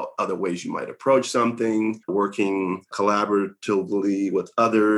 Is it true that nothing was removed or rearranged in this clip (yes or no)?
no